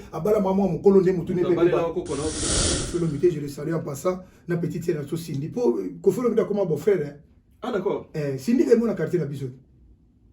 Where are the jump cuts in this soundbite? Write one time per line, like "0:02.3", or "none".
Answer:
0:02.8